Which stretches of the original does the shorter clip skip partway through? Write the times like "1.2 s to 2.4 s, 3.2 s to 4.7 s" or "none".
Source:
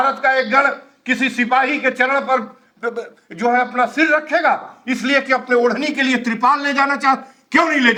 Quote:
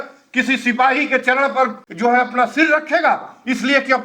2.6 s to 3.2 s